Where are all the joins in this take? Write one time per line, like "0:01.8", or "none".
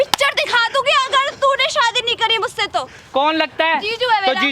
0:03.0